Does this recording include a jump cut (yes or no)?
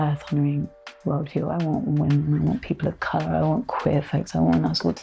no